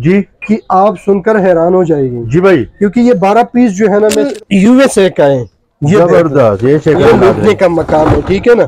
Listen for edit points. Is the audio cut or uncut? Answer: cut